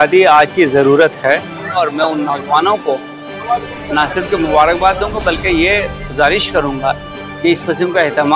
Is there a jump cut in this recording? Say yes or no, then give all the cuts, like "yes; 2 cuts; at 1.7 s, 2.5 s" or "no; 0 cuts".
yes; 1 cut; at 1.8 s